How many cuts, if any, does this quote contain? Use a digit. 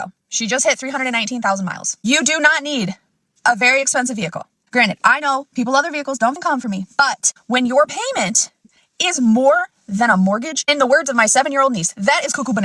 0